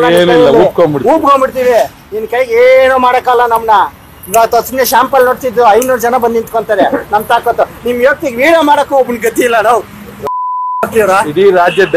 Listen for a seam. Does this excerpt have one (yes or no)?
no